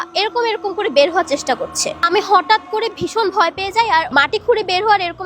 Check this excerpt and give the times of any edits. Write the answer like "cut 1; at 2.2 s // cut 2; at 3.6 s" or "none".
cut 1; at 4.1 s